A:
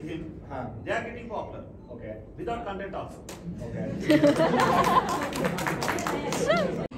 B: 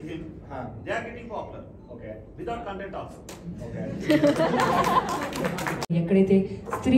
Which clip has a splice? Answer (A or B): B